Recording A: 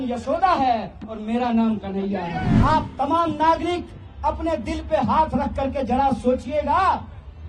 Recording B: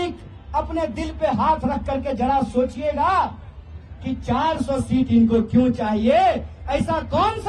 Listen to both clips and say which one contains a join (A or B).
A